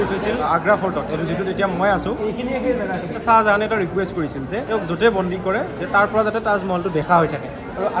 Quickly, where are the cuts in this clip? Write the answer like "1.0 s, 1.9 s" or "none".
2.5 s, 4.6 s

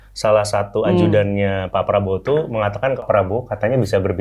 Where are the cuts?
3.0 s

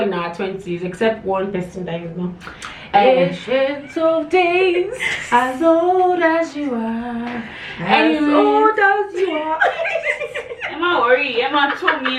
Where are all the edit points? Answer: none

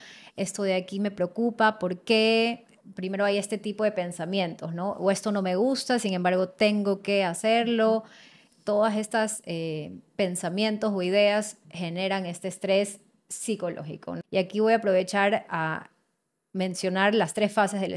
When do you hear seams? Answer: 14.2 s

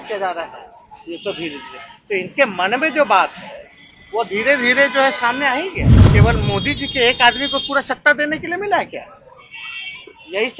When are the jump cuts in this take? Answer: 5.9 s

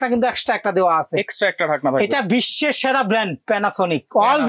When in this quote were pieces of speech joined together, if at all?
none

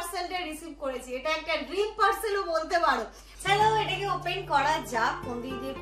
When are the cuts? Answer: 3.3 s

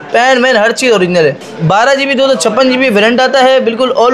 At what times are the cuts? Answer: 1.4 s

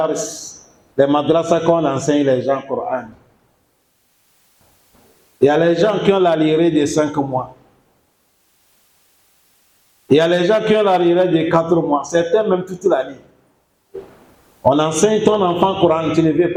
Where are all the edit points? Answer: none

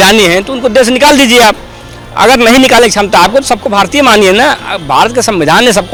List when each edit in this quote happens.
none

